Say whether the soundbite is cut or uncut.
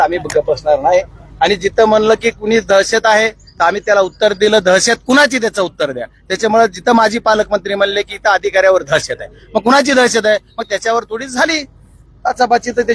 uncut